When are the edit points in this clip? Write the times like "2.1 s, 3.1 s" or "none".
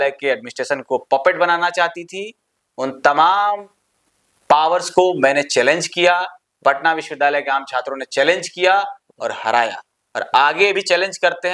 none